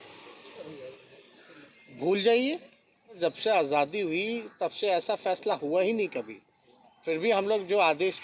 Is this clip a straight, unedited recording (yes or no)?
no